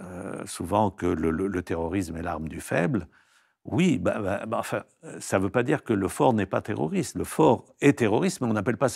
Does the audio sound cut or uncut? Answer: uncut